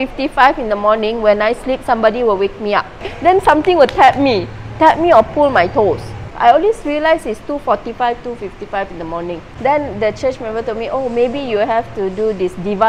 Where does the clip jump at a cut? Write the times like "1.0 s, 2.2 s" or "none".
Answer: 3.1 s, 6.3 s, 9.4 s